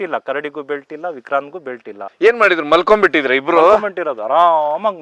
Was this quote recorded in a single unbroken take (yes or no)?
no